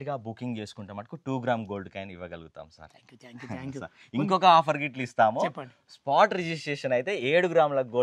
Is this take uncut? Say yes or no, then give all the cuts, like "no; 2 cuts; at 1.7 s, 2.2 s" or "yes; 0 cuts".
yes; 0 cuts